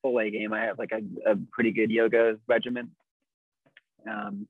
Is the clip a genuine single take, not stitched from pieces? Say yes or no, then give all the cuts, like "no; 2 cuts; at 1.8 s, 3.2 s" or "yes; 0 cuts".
yes; 0 cuts